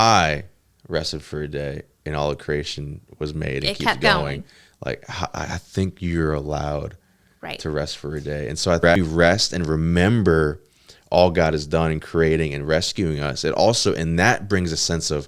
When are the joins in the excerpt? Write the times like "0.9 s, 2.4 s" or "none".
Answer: 8.9 s